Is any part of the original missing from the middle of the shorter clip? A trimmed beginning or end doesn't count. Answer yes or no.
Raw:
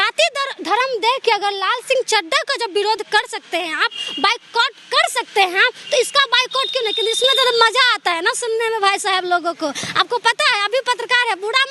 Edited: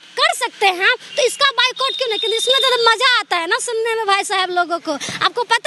no